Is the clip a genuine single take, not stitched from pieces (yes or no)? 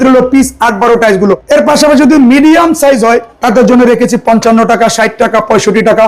no